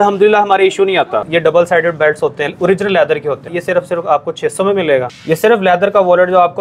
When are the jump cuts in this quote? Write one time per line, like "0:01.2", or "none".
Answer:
0:01.3
0:03.5
0:05.1